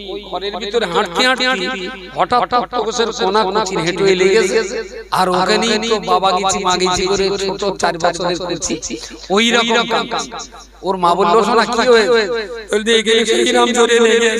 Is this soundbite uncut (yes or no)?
yes